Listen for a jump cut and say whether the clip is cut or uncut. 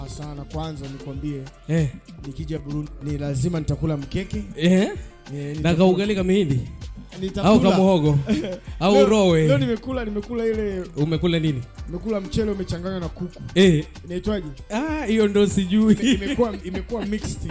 cut